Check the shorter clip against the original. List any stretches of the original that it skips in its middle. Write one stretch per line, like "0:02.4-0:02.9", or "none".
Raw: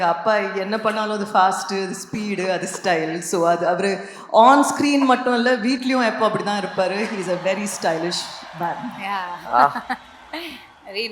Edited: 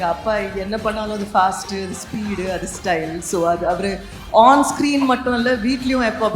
none